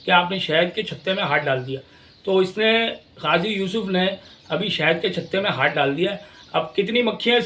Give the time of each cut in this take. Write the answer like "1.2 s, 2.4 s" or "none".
none